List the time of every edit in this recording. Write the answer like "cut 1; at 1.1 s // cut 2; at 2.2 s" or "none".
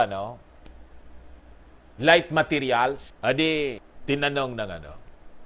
cut 1; at 3.1 s // cut 2; at 3.9 s

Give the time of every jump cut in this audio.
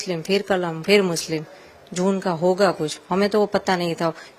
none

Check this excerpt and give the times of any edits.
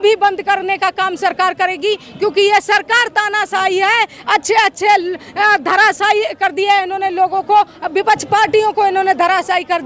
none

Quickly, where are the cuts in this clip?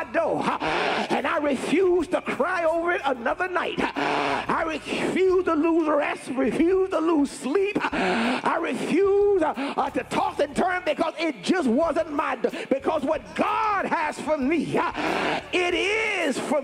none

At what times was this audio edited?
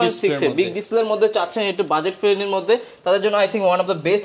none

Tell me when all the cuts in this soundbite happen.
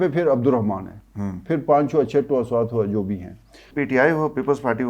cut 1; at 3.7 s

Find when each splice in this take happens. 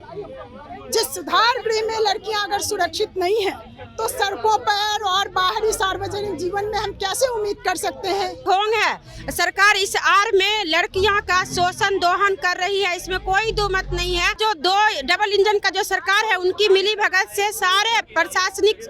cut 1; at 8.4 s // cut 2; at 14.4 s

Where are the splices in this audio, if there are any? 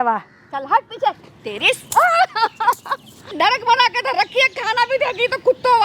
cut 1; at 3.3 s

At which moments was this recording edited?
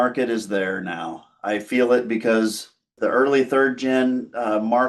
cut 1; at 2.9 s

